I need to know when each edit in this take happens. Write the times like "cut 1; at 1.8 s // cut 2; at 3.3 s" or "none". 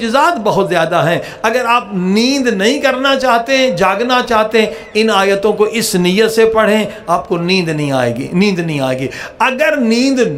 none